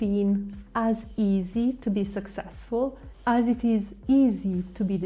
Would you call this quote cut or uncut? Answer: uncut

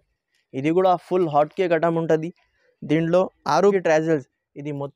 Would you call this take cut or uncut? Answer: cut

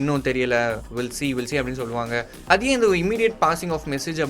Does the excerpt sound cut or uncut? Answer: cut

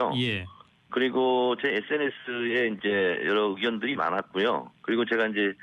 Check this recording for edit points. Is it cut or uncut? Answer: cut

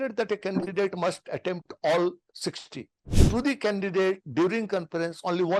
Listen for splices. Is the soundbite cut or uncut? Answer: cut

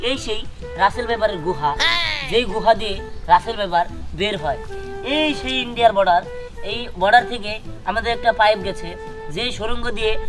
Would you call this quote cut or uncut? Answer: uncut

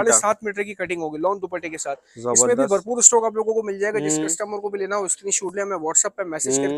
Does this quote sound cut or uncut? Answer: uncut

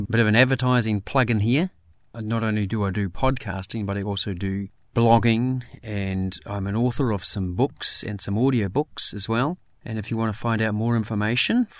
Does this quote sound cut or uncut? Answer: cut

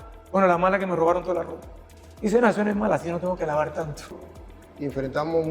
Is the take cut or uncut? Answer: cut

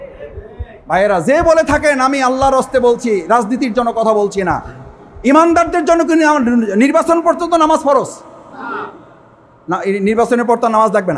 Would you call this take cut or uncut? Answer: uncut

